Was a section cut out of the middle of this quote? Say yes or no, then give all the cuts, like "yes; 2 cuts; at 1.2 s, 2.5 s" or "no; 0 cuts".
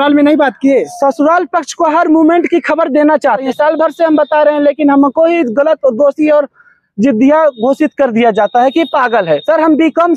yes; 3 cuts; at 0.9 s, 3.4 s, 9.4 s